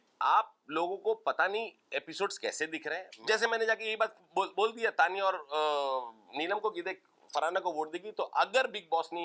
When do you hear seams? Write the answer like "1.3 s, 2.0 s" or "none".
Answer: 3.1 s